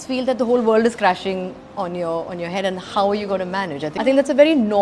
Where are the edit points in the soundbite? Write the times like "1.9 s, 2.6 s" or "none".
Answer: 3.9 s